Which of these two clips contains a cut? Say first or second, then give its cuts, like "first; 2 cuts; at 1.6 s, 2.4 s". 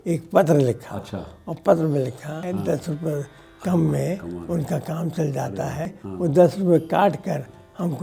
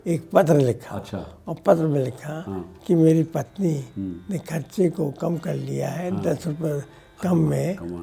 first; 2 cuts; at 2.4 s, 6.0 s